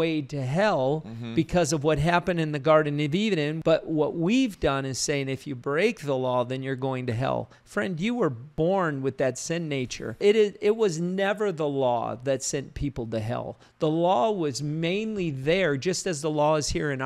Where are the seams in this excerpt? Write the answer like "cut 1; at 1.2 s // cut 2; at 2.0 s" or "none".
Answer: cut 1; at 3.5 s // cut 2; at 8.5 s // cut 3; at 10.2 s

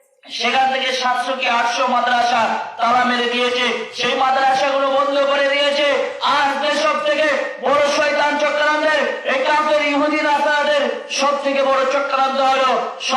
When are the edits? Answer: none

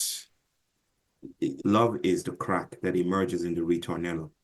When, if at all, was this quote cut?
cut 1; at 1.6 s

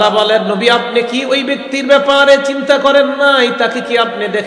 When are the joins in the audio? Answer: none

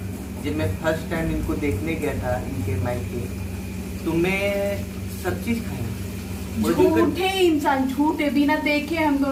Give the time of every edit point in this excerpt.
none

